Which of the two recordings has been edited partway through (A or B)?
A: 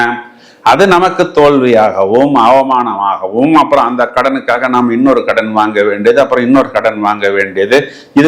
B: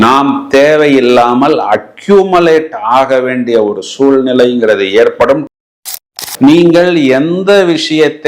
B